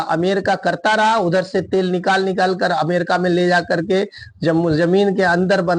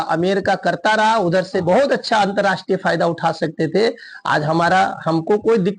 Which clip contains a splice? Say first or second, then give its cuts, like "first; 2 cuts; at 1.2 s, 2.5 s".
second; 1 cut; at 1.6 s